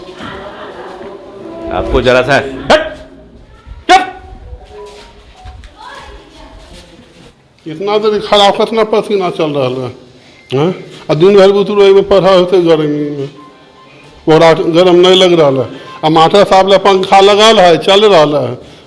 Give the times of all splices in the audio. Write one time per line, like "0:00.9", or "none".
0:07.3